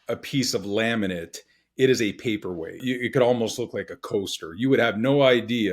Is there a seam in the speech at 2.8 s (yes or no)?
yes